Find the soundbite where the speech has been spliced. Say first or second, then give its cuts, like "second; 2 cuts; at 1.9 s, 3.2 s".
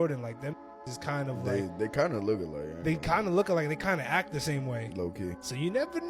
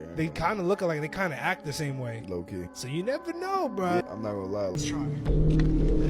second; 1 cut; at 4.8 s